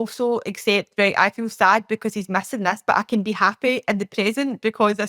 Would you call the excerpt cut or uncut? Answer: uncut